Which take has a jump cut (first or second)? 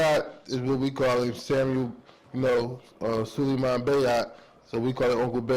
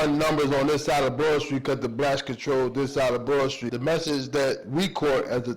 second